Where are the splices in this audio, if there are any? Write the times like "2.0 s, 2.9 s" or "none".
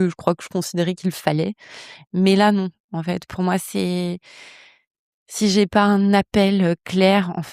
none